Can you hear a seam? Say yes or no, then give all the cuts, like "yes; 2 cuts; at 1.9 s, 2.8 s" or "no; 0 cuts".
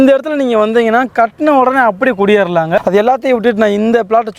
yes; 1 cut; at 2.8 s